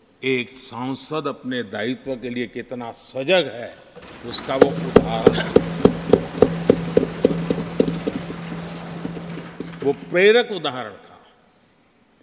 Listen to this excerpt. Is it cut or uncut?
uncut